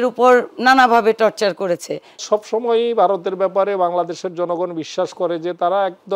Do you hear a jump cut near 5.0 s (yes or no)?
no